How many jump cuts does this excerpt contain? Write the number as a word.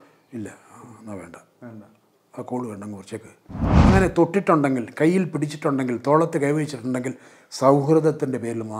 one